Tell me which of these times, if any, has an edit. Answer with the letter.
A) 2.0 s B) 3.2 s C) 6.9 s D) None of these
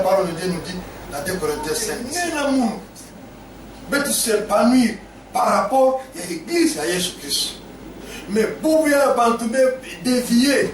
A